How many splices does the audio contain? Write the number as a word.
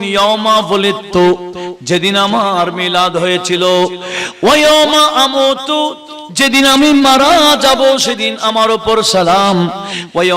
zero